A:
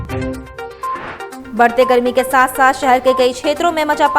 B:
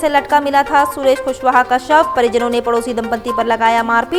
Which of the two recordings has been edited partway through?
A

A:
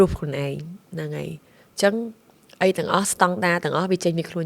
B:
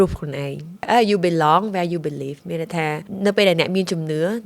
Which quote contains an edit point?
B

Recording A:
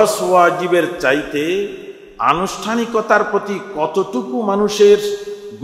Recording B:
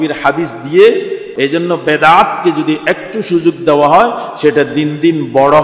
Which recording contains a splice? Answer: B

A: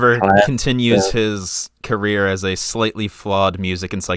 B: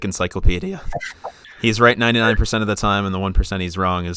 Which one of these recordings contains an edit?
B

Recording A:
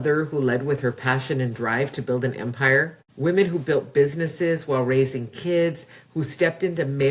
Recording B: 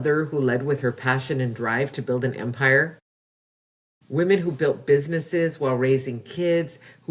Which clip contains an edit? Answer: A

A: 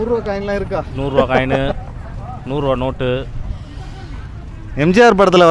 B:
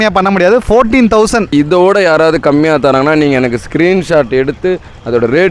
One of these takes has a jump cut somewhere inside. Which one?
B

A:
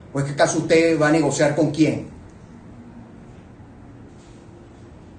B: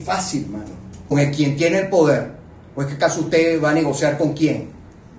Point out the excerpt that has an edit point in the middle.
B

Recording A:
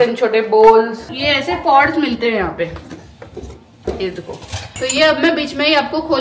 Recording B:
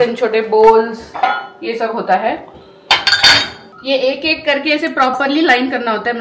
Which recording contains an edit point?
A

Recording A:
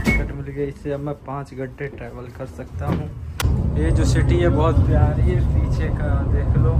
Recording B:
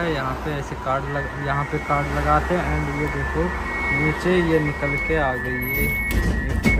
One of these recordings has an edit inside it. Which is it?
A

